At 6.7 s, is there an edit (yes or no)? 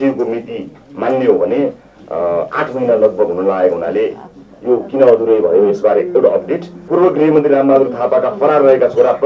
yes